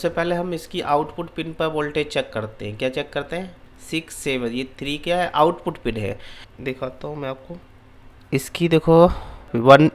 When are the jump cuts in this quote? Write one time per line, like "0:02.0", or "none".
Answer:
none